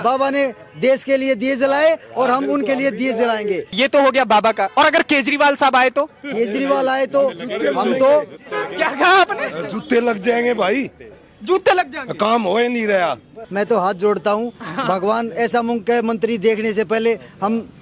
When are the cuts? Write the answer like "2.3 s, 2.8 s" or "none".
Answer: 3.7 s, 13.4 s